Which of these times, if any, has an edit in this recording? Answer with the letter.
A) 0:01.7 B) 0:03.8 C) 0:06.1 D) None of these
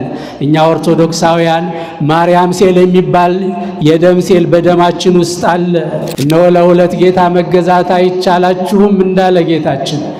C